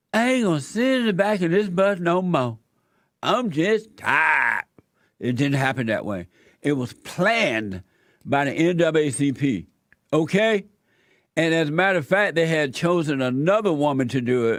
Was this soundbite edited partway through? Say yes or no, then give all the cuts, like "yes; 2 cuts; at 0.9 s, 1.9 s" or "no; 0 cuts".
no; 0 cuts